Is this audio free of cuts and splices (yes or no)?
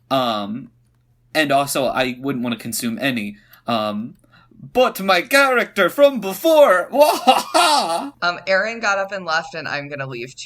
no